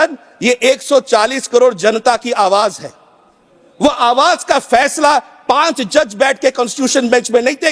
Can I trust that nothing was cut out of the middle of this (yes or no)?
yes